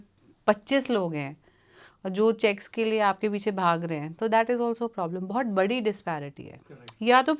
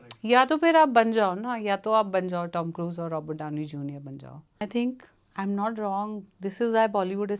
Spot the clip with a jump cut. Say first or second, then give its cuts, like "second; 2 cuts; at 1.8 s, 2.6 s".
second; 1 cut; at 4.6 s